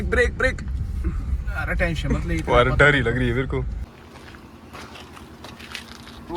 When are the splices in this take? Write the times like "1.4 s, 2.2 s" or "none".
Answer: 3.9 s